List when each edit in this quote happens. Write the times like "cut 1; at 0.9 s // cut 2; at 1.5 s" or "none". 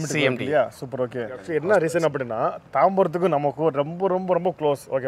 cut 1; at 1.4 s